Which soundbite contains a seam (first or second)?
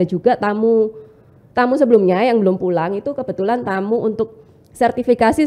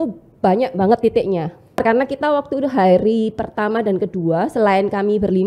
second